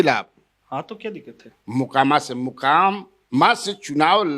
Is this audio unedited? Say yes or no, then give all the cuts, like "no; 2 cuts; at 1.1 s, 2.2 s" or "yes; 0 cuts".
no; 1 cut; at 1.5 s